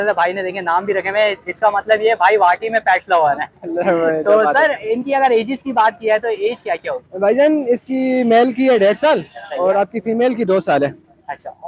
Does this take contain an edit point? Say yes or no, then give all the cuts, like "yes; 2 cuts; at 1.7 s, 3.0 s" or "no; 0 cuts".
no; 0 cuts